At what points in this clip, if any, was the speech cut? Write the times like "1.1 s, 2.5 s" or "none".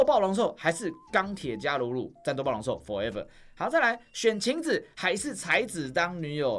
none